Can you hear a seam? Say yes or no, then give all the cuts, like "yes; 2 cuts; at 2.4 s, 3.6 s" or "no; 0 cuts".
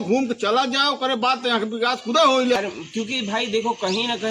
yes; 1 cut; at 2.6 s